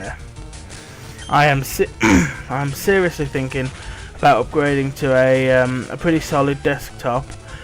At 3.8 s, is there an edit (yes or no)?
no